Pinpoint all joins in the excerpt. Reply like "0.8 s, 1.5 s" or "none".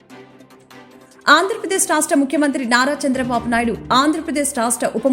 1.1 s